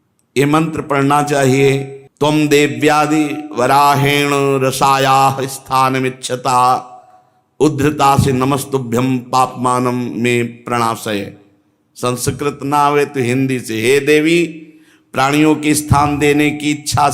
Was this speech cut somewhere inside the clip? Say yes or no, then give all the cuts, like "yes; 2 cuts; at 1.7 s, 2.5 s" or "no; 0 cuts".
yes; 1 cut; at 2.0 s